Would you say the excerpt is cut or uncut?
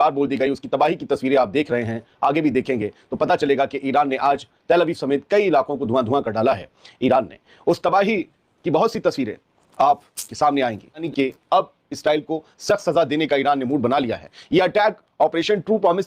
cut